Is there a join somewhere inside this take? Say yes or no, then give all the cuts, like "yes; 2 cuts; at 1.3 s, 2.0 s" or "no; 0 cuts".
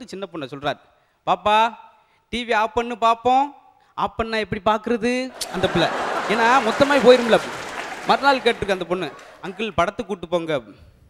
no; 0 cuts